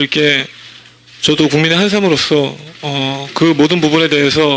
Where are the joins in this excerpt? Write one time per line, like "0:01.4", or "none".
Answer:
none